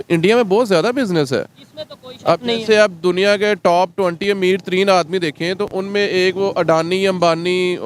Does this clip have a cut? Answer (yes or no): no